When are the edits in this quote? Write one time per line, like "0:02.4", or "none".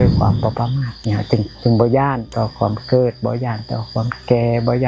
0:00.9
0:02.3